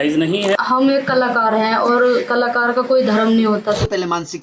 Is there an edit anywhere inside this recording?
yes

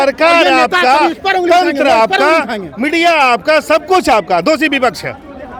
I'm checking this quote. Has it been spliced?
no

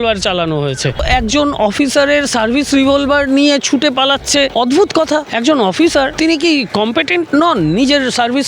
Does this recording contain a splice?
yes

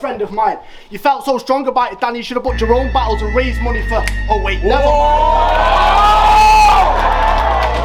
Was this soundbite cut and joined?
no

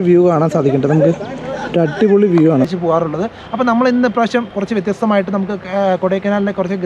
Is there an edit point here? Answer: yes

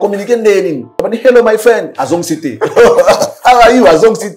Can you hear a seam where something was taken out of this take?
yes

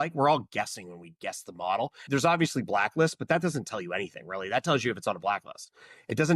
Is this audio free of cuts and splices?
no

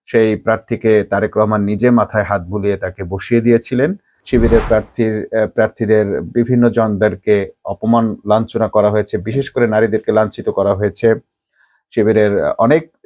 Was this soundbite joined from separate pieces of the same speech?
yes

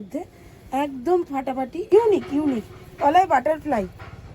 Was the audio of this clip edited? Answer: yes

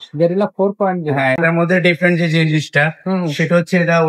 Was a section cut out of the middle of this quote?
yes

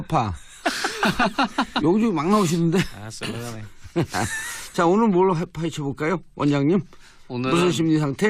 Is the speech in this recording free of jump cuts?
yes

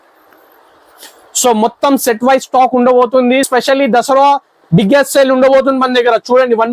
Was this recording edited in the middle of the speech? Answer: yes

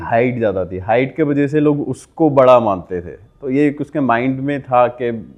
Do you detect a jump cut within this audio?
no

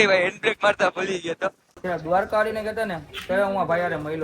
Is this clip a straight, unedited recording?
no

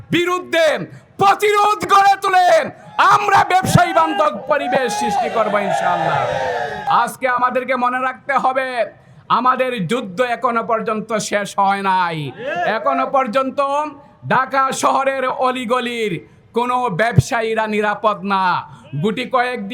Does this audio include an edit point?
yes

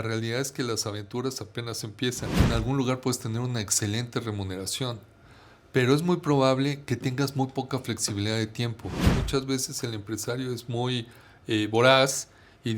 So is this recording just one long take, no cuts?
no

